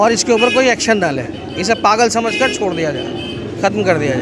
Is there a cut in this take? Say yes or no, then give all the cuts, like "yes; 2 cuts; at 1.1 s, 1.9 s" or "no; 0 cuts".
no; 0 cuts